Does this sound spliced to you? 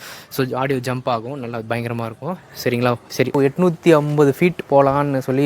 yes; 1 cut; at 3.4 s

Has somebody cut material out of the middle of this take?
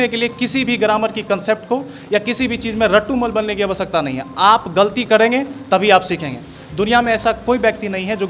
no; 0 cuts

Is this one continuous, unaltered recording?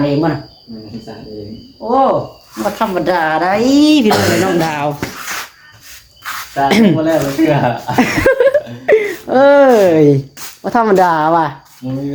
yes; 0 cuts

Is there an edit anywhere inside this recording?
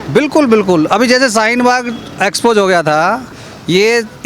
yes; 1 cut; at 3.3 s

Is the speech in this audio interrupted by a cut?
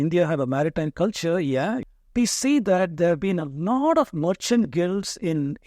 yes; 1 cut; at 1.8 s

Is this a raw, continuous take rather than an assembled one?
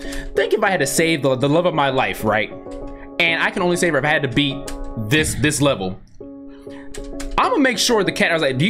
yes; 0 cuts

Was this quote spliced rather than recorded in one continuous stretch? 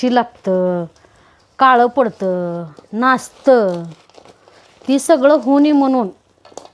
no; 0 cuts

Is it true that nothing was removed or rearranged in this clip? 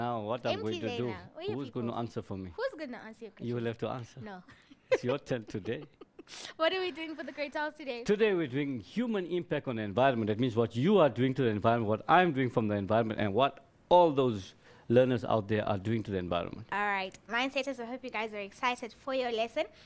yes; 0 cuts

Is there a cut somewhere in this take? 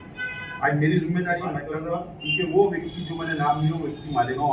yes; 1 cut; at 1.7 s

